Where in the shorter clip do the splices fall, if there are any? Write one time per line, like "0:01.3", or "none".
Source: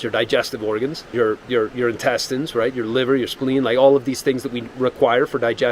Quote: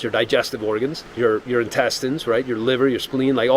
0:01.1